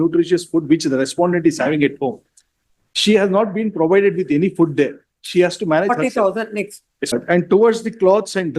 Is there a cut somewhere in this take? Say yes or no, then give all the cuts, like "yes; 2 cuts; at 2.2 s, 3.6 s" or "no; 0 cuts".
yes; 1 cut; at 7.1 s